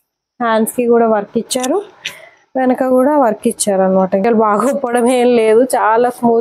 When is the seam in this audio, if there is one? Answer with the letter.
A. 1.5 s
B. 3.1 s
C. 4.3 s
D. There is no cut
C